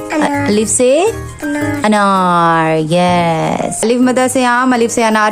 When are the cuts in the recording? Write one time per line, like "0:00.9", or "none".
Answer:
0:03.8